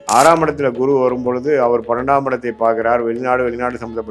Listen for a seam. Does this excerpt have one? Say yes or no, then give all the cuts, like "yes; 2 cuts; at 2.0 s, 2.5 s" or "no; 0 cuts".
no; 0 cuts